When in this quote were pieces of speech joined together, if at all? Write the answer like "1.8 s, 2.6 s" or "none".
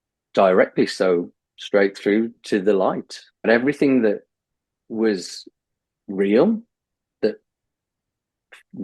3.5 s